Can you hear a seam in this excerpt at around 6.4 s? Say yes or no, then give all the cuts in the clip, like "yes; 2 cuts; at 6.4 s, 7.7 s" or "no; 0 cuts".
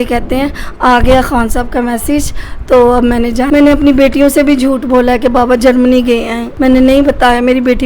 yes; 2 cuts; at 3.5 s, 6.4 s